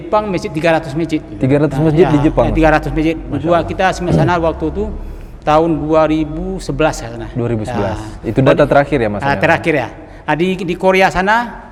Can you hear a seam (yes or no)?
no